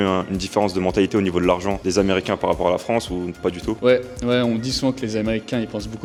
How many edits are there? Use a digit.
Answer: 0